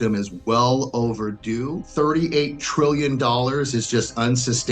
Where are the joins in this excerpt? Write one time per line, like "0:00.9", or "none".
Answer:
0:01.8